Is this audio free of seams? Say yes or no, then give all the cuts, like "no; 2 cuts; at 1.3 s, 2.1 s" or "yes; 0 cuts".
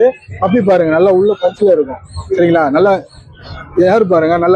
yes; 0 cuts